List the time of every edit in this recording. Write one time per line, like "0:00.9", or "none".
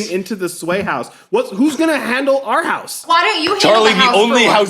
0:03.0